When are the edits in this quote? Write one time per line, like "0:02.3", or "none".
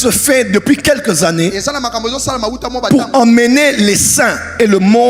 none